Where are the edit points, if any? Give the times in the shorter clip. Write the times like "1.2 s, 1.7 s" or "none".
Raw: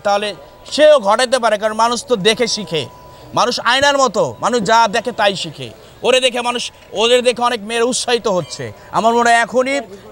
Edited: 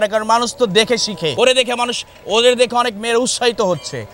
1.3 s